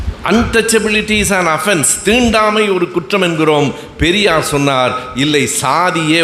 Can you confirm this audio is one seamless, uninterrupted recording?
yes; 0 cuts

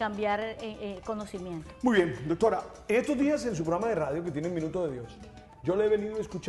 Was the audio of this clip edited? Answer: yes; 1 cut; at 3.6 s

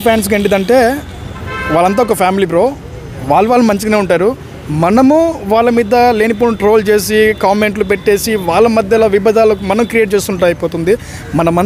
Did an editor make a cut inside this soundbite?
no; 0 cuts

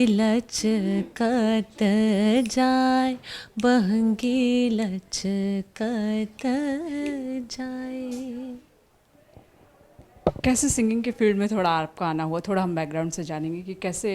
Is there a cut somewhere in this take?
no; 0 cuts

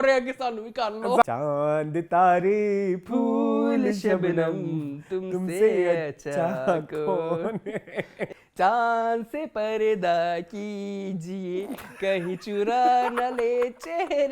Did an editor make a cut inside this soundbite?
yes; 2 cuts; at 1.2 s, 8.4 s

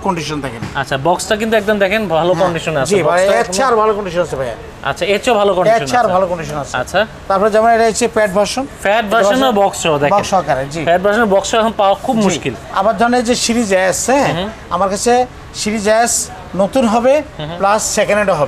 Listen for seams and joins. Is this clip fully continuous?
yes; 0 cuts

